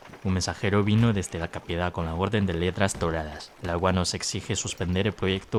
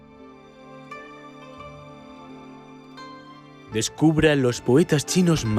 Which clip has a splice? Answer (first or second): second